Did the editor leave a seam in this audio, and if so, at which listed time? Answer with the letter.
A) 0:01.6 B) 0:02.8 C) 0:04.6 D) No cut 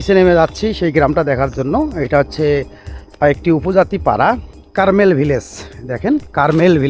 C